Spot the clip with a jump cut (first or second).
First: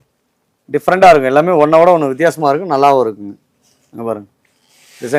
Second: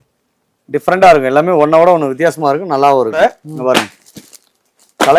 second